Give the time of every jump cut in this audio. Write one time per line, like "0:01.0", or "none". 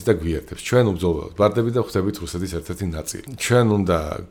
0:03.3